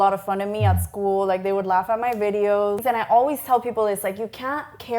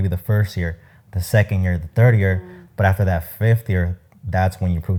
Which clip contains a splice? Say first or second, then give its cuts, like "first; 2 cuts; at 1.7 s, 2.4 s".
first; 1 cut; at 2.8 s